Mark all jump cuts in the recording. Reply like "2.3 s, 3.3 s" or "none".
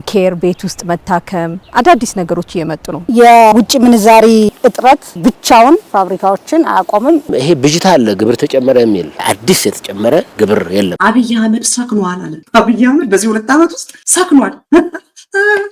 3.0 s, 7.3 s, 10.9 s